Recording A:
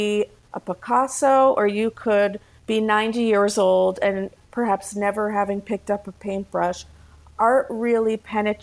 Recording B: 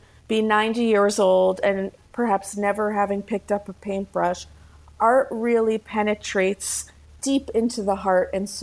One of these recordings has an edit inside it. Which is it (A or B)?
B